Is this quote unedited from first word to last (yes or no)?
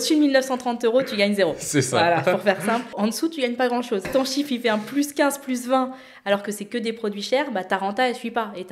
no